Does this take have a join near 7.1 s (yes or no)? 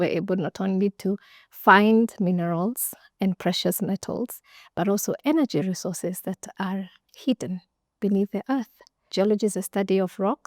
no